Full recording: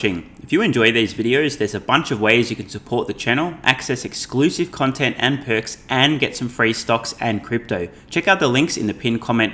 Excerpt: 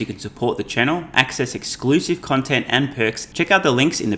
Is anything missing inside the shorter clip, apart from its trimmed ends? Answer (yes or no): yes